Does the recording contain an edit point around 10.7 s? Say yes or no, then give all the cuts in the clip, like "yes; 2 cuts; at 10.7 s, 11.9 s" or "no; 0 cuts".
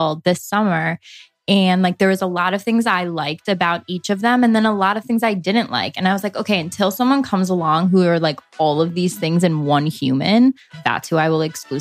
yes; 1 cut; at 10.7 s